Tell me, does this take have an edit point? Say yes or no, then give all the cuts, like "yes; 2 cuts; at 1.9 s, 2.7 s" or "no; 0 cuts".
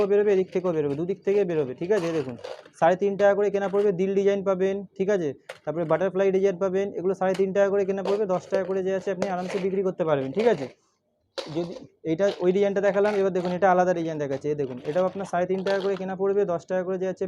no; 0 cuts